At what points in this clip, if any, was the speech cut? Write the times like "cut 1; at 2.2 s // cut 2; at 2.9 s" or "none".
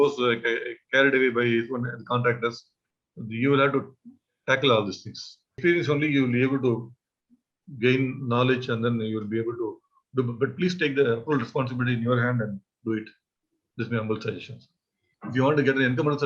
cut 1; at 5.6 s // cut 2; at 15.1 s